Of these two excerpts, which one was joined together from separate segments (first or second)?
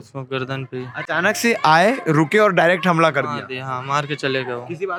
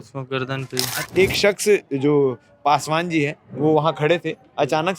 second